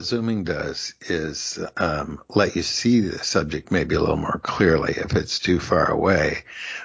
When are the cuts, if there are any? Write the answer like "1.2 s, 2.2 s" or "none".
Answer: none